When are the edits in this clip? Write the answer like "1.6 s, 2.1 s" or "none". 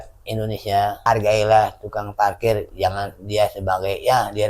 1.0 s